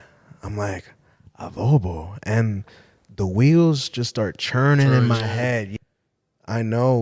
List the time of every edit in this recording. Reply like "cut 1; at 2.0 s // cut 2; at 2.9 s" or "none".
cut 1; at 5.7 s